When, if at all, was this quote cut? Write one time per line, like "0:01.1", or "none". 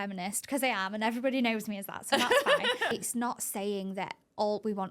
0:02.9